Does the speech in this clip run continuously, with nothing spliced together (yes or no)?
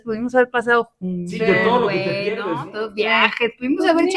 yes